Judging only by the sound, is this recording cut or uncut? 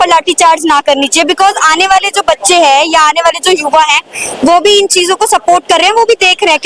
uncut